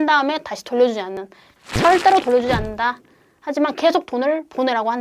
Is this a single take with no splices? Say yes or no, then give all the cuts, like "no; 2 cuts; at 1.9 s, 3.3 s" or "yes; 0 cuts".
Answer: no; 1 cut; at 1.4 s